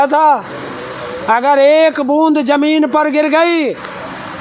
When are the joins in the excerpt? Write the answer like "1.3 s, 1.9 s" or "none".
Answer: none